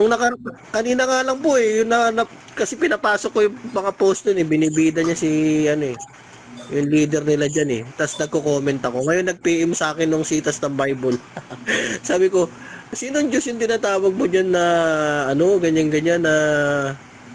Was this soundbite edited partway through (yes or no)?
no